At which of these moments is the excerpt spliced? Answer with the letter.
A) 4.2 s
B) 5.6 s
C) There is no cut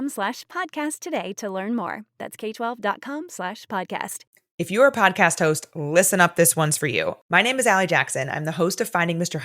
A